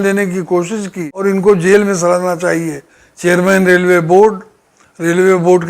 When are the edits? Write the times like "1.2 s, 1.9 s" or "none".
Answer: 1.1 s